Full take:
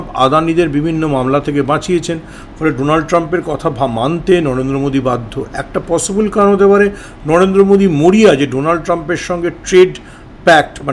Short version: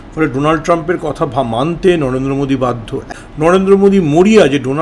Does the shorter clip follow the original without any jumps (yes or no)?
no